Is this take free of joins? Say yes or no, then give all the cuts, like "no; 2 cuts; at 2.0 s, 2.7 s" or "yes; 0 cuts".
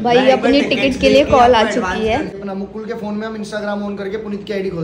no; 1 cut; at 2.4 s